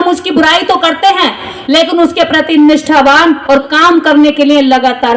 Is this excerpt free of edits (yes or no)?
yes